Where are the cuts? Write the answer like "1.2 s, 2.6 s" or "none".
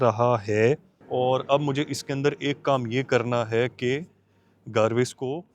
0.9 s